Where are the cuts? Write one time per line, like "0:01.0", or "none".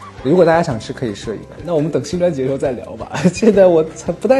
0:01.5